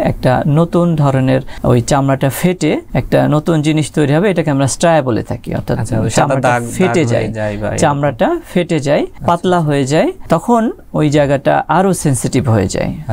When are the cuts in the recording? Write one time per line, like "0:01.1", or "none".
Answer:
0:01.5
0:02.9
0:09.1
0:10.2